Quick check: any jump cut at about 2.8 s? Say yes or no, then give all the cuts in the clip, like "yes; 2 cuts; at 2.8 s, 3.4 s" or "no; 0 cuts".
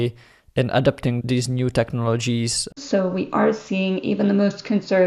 yes; 2 cuts; at 1.2 s, 2.8 s